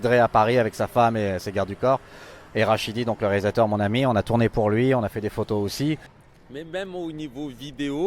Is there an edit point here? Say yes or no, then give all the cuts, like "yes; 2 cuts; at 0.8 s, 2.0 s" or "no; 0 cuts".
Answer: no; 0 cuts